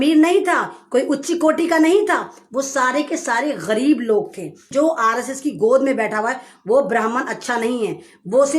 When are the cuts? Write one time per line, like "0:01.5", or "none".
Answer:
0:04.6